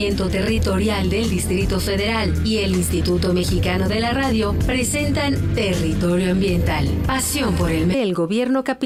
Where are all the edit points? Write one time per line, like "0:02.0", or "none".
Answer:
none